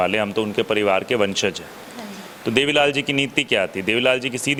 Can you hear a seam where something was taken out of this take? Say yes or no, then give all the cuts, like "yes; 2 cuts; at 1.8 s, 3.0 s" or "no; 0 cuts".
no; 0 cuts